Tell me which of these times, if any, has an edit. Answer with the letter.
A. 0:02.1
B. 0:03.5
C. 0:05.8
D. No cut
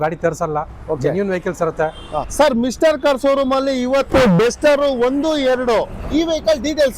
A